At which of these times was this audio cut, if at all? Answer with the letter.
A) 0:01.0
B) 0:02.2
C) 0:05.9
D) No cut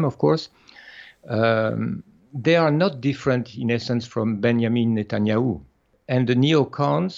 C